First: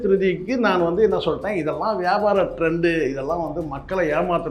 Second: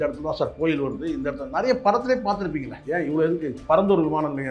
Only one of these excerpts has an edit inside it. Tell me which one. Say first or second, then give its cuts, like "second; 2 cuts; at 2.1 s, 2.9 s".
second; 1 cut; at 2.8 s